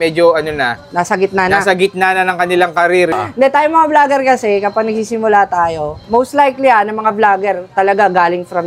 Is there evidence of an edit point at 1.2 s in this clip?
no; 1 cut; at 3.3 s

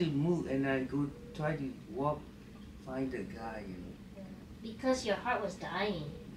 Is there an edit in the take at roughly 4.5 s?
yes; 1 cut; at 4.5 s

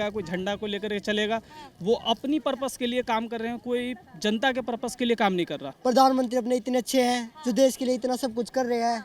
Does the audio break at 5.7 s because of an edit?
yes; 1 cut; at 5.7 s

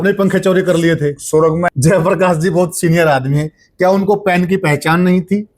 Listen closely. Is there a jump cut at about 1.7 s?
yes; 1 cut; at 1.7 s

